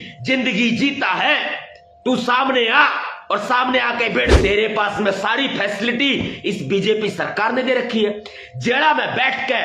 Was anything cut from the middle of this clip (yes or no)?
yes